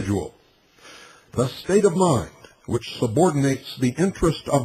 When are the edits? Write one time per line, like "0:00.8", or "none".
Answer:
0:03.0